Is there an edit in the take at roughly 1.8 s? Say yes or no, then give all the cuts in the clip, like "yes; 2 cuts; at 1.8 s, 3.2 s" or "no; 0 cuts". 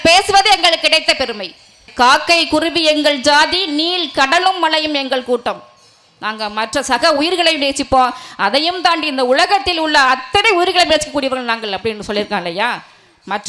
yes; 1 cut; at 1.8 s